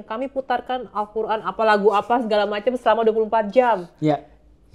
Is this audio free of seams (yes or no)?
yes